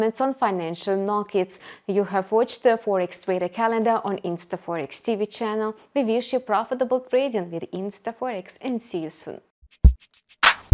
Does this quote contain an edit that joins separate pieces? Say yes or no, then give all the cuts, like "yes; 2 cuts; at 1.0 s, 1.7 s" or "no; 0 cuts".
yes; 1 cut; at 9.7 s